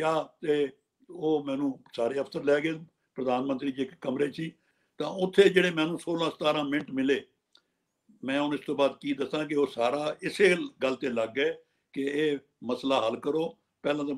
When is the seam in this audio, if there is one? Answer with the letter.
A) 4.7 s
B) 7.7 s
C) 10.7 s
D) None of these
A